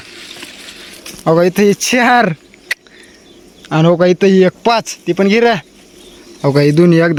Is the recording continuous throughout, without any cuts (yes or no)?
yes